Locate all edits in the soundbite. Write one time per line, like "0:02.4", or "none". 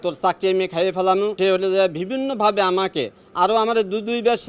0:01.3